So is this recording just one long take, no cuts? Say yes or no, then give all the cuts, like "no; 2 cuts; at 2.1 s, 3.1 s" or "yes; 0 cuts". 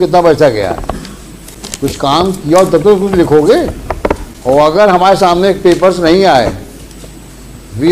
yes; 0 cuts